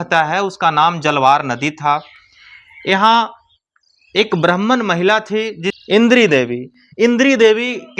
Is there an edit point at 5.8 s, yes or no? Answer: yes